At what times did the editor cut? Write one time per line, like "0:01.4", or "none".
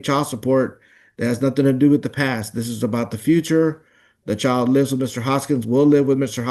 none